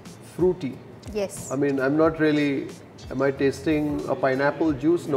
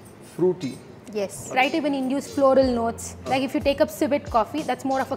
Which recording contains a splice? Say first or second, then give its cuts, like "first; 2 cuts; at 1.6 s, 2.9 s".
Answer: second; 1 cut; at 1.5 s